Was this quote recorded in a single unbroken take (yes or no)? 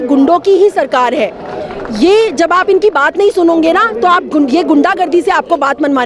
yes